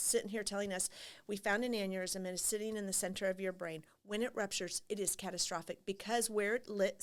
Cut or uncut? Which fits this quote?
uncut